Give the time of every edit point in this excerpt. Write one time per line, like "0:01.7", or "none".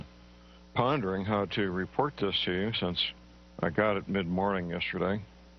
0:01.9